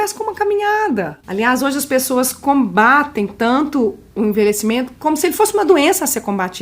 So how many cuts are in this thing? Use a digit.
2